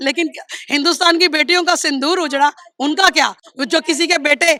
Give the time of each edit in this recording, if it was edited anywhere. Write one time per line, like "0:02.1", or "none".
none